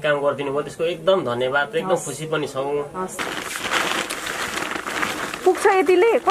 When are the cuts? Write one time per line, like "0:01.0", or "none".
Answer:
0:03.2